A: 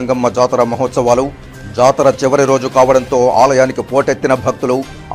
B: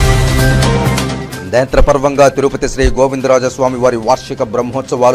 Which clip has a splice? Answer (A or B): B